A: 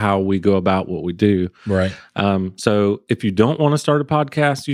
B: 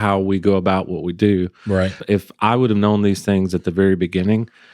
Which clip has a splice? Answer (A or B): B